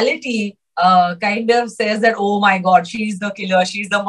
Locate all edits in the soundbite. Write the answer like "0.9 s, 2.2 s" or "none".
none